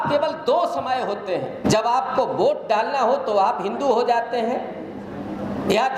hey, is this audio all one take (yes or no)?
no